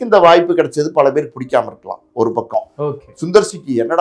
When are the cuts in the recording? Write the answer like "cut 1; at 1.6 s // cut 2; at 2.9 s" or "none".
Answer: none